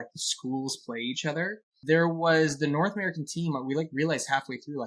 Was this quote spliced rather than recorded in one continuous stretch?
yes; 1 cut; at 1.7 s

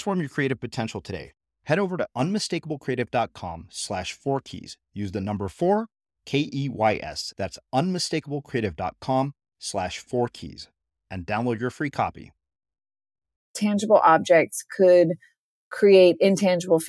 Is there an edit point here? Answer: yes; 1 cut; at 13.5 s

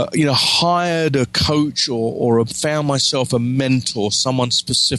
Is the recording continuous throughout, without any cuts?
yes; 0 cuts

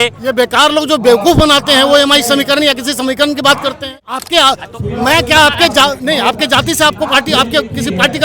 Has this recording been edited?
yes; 1 cut; at 3.8 s

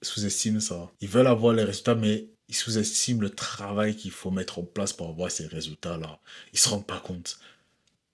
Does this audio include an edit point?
yes; 1 cut; at 0.9 s

